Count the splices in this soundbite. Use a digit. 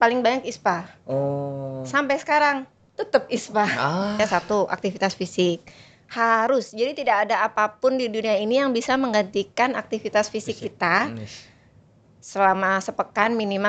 1